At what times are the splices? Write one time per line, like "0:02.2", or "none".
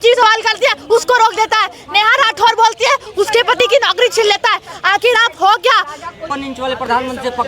0:06.3